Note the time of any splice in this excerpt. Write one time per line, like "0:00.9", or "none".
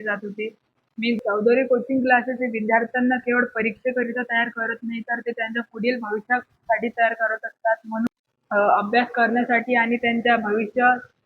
0:01.2
0:08.1